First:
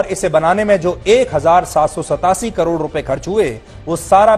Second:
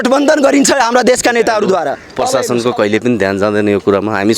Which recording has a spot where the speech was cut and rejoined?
second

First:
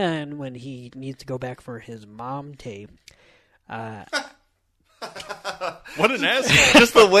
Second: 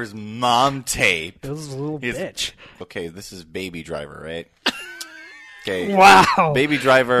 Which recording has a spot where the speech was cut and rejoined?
second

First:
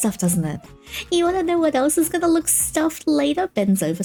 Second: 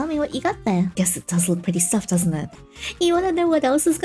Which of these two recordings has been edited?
second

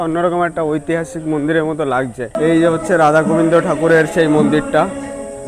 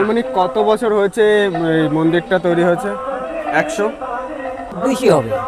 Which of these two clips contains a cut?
first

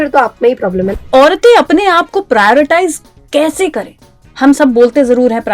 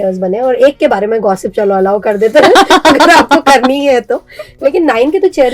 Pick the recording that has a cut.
first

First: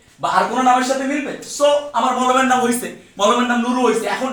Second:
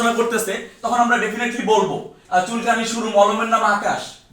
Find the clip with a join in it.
second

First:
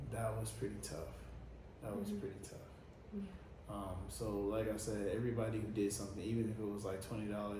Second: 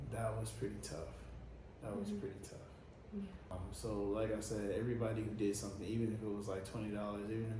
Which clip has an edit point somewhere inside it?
second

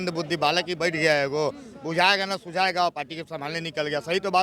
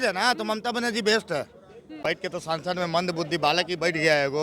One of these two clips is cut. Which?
second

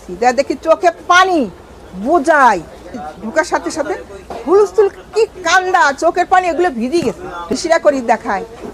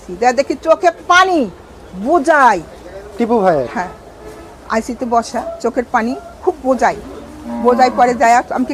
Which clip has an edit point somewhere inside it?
first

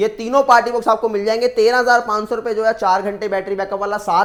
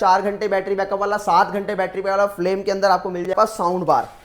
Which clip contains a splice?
second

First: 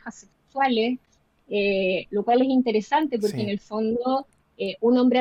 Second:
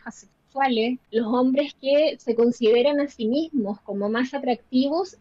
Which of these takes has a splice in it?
second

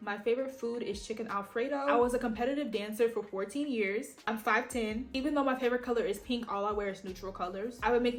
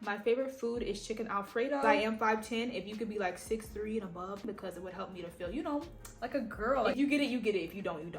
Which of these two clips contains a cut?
second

